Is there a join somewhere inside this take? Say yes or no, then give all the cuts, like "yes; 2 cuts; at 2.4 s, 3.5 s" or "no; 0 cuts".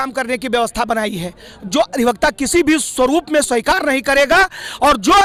no; 0 cuts